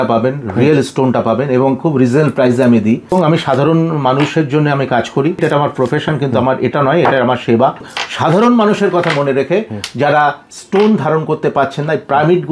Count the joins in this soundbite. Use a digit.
3